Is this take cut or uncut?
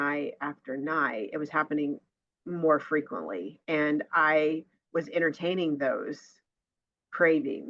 uncut